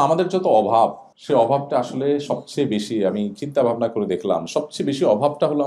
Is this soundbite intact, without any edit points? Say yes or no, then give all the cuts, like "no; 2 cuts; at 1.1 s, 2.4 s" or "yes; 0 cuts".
no; 1 cut; at 1.1 s